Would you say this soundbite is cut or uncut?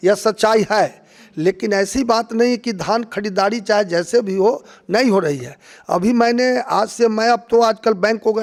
uncut